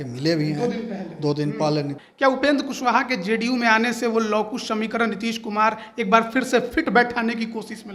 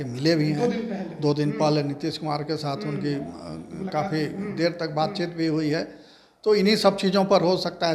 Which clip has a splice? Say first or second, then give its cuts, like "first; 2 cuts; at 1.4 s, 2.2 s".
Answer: first; 1 cut; at 2.0 s